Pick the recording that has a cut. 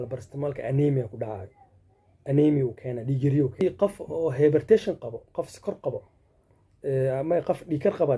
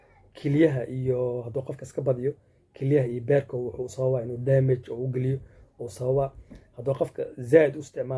first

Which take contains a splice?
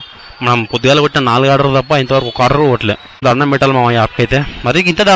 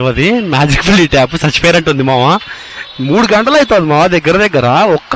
first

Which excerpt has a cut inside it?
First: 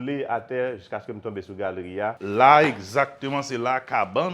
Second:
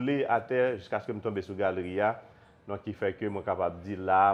first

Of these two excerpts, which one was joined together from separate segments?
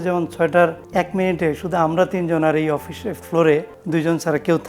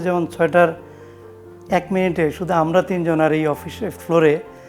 first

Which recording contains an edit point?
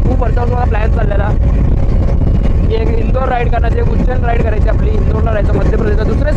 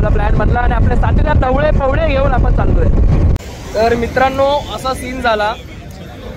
second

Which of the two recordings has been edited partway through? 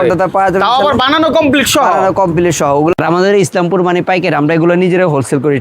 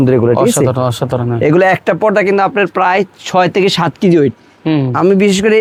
first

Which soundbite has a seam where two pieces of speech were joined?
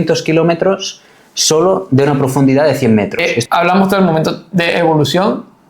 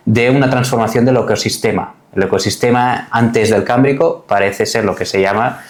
first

